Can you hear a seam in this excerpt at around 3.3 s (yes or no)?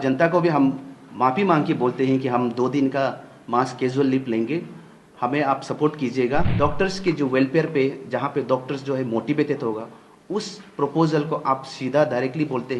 no